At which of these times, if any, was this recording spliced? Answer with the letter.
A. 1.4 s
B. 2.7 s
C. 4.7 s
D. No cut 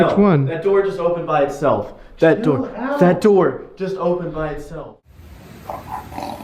C